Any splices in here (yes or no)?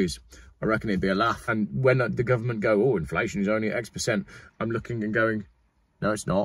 yes